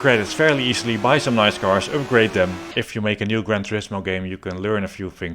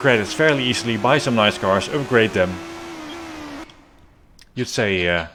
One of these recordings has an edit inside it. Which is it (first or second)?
first